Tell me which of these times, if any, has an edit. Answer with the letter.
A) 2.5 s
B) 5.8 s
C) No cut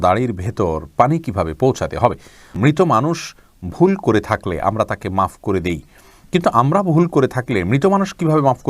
A